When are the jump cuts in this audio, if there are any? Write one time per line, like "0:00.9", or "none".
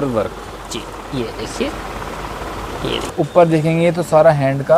0:03.1